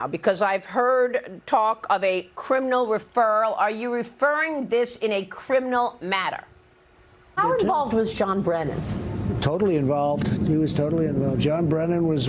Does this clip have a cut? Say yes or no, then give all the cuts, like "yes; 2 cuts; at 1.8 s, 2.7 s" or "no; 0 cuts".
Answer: yes; 1 cut; at 7.3 s